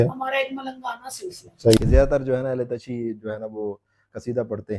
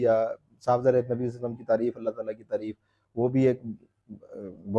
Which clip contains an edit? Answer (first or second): first